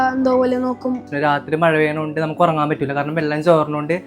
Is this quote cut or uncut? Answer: cut